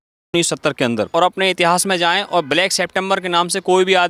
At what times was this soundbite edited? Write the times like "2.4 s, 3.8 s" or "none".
1.1 s